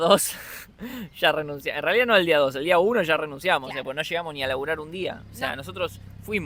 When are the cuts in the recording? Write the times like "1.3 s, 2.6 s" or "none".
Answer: none